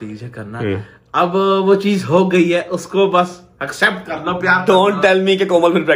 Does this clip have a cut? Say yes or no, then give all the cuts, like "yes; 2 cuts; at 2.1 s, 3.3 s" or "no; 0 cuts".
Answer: no; 0 cuts